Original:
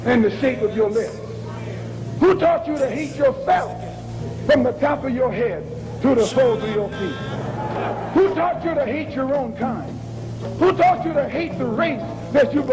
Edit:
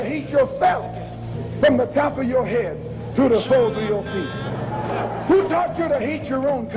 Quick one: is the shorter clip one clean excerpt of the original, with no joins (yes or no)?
yes